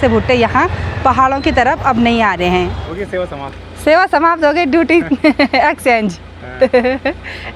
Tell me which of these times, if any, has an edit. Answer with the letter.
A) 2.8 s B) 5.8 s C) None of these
A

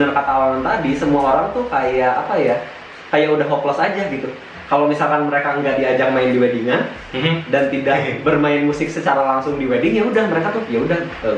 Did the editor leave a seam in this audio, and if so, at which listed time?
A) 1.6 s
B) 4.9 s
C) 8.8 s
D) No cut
D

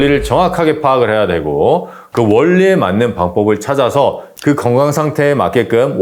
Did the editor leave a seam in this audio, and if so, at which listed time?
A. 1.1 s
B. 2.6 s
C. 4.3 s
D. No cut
C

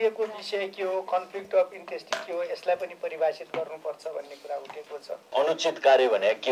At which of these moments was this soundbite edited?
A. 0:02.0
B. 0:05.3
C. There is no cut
B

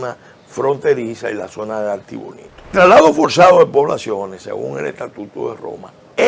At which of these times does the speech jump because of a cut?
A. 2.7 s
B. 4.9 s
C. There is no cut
A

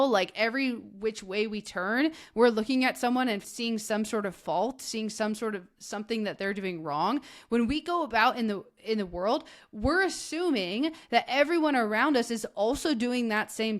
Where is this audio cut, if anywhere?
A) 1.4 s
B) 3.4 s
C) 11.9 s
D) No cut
B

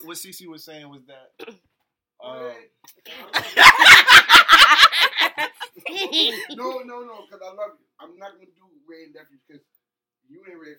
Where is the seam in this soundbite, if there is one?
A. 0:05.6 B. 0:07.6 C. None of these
C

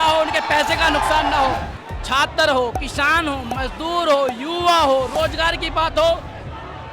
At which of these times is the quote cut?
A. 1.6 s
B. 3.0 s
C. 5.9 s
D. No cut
A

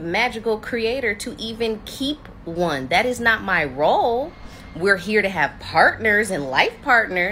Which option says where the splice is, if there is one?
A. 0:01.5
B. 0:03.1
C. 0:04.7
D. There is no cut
B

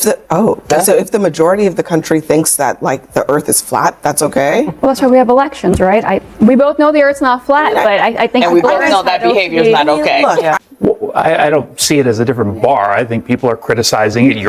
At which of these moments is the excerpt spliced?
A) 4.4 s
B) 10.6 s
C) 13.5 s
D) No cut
B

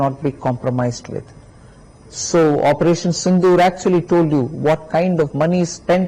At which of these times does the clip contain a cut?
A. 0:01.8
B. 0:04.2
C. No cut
C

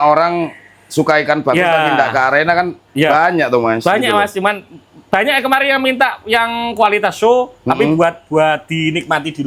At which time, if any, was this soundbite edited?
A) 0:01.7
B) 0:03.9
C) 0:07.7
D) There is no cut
D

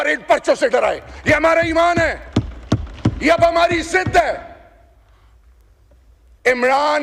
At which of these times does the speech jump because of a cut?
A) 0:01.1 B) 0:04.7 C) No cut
C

